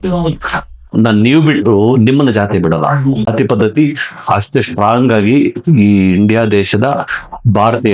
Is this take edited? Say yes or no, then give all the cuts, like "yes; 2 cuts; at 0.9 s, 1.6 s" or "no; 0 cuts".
no; 0 cuts